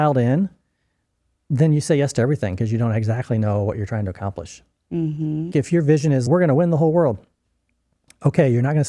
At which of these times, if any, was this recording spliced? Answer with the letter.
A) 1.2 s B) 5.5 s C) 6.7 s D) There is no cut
B